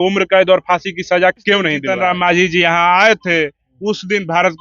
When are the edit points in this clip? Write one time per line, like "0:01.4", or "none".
0:01.8